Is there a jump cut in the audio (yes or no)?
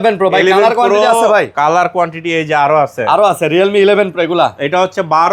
no